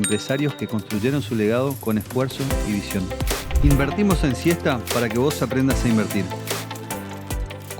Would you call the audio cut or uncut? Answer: uncut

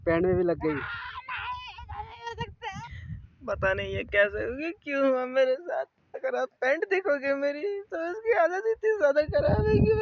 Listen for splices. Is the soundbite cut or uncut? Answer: cut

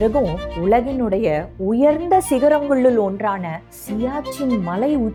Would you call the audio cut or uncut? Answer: uncut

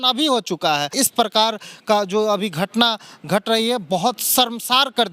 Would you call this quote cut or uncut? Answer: cut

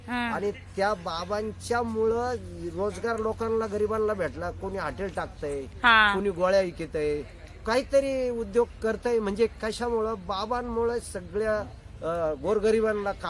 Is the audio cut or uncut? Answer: uncut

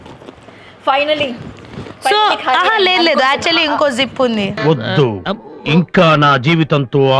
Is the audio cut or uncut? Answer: uncut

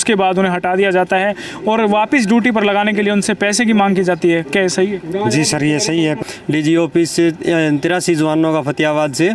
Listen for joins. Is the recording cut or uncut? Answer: cut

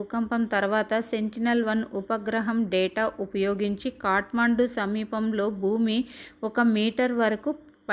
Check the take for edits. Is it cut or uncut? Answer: uncut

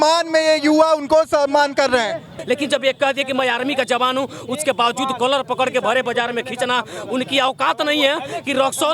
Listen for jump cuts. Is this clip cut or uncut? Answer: cut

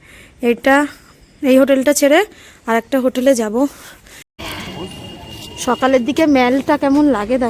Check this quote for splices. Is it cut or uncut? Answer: cut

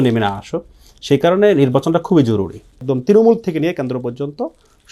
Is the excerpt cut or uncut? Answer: cut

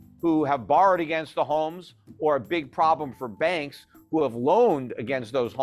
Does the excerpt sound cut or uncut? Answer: uncut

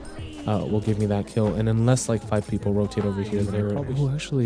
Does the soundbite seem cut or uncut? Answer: cut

